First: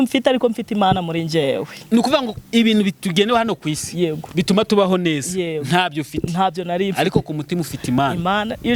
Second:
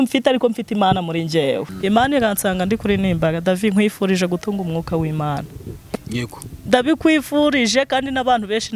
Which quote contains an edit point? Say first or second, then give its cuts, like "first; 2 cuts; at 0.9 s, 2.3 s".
second; 1 cut; at 1.7 s